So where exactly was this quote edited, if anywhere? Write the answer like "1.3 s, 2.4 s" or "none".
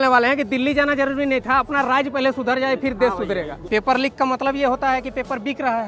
3.6 s